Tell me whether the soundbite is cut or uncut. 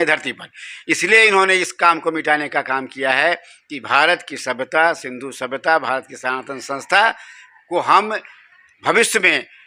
uncut